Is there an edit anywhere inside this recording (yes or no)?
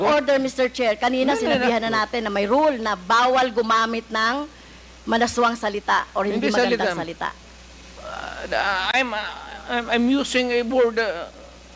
no